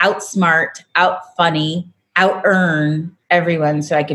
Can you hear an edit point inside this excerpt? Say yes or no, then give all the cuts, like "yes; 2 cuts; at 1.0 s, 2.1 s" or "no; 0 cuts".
yes; 2 cuts; at 2.0 s, 3.1 s